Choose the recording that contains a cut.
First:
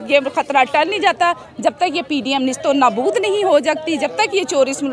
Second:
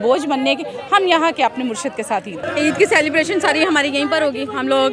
second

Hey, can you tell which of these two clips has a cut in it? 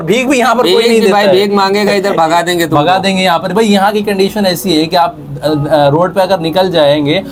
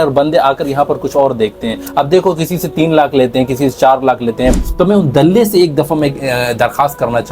second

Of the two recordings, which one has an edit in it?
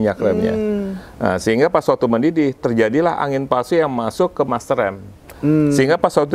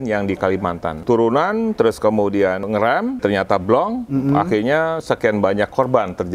second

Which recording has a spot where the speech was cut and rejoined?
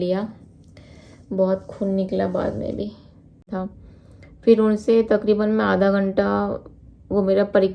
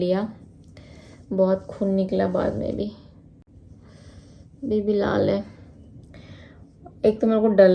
first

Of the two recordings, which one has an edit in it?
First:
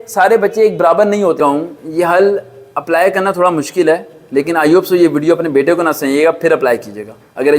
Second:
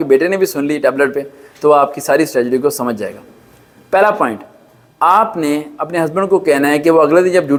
first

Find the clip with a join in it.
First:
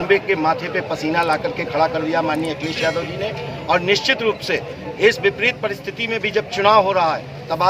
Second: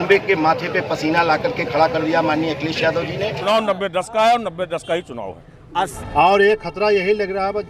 second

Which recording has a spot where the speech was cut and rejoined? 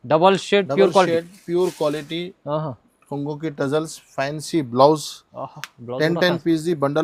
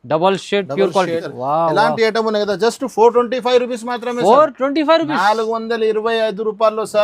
second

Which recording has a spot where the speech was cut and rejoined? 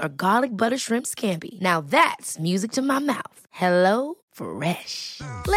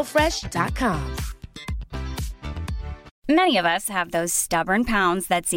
second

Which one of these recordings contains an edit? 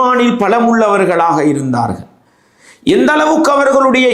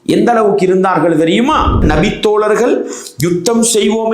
second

